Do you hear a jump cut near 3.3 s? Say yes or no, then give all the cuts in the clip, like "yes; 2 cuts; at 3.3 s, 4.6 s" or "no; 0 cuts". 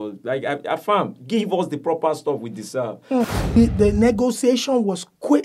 yes; 1 cut; at 3.3 s